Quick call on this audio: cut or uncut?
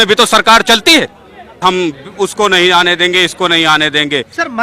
cut